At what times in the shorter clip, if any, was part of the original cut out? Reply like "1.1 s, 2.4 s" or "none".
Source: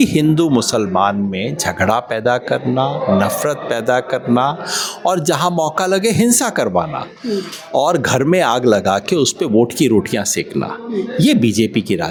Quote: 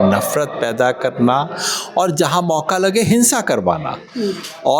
none